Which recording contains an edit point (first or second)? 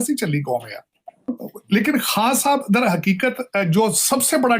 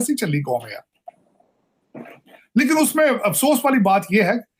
first